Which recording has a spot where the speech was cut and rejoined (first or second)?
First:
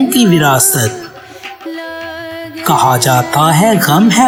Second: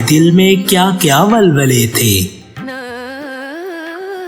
second